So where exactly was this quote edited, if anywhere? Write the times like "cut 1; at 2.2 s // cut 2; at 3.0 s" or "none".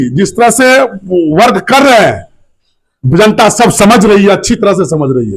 none